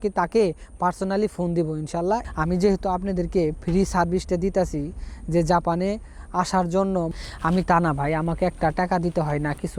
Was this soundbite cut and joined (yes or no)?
yes